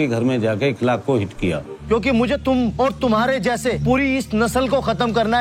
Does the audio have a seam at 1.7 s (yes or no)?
yes